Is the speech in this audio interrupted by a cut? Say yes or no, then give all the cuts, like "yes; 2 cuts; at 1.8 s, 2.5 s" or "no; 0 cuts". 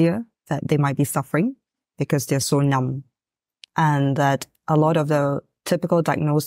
no; 0 cuts